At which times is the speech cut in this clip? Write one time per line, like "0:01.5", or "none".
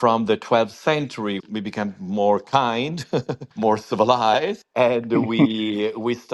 0:01.4